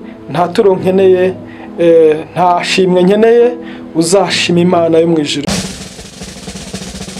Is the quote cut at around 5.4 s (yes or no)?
yes